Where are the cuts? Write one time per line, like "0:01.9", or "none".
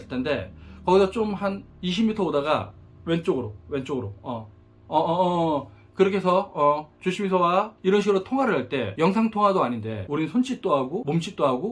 0:07.7
0:08.9
0:10.0